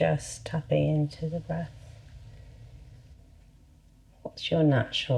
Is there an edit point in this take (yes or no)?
yes